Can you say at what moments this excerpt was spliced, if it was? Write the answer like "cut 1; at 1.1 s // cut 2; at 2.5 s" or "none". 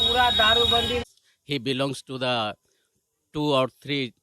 cut 1; at 1.0 s